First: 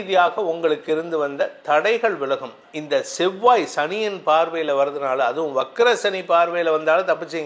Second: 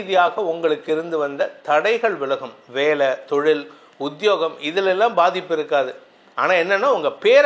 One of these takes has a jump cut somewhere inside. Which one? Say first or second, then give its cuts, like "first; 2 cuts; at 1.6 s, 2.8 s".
first; 1 cut; at 2.6 s